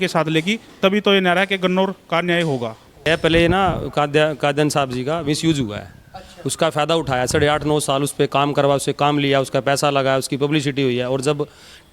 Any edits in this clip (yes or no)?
yes